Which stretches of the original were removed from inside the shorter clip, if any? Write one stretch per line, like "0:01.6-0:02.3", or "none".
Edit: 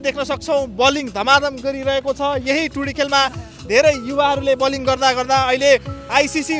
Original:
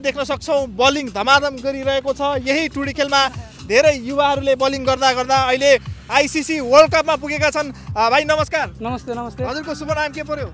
none

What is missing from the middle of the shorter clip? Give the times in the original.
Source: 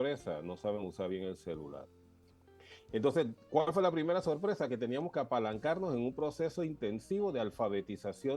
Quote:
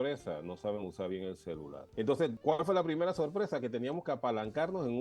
0:01.8-0:02.8
0:03.3-0:03.4

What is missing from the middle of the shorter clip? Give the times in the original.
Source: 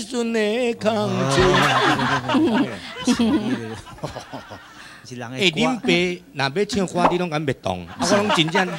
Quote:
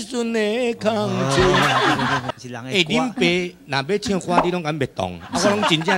0:02.2-0:04.9

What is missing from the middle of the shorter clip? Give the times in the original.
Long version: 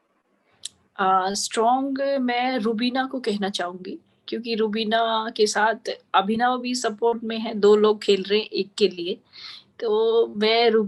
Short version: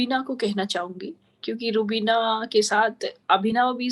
none

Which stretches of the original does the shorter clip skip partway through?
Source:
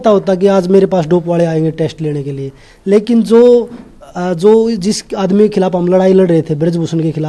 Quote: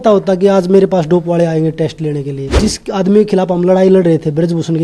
0:02.6-0:04.8

